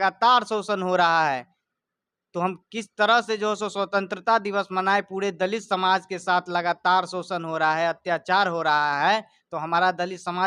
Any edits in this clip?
no; 0 cuts

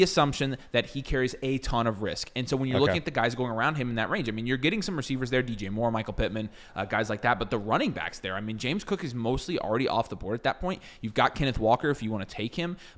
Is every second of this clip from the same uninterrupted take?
yes; 0 cuts

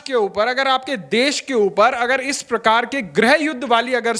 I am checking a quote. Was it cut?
no; 0 cuts

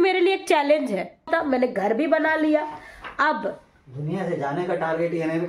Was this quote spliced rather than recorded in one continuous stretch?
yes; 1 cut; at 1.3 s

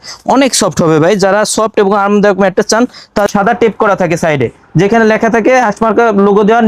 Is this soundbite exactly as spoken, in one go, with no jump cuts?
no; 1 cut; at 3.3 s

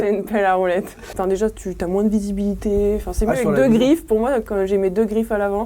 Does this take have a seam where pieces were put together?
yes; 1 cut; at 1.1 s

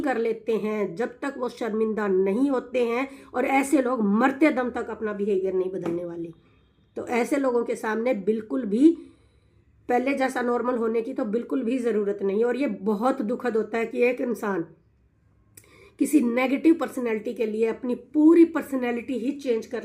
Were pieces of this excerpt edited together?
no; 0 cuts

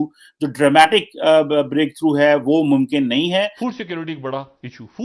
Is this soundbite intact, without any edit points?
no; 1 cut; at 3.5 s

